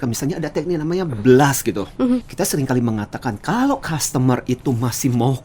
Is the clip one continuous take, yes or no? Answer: no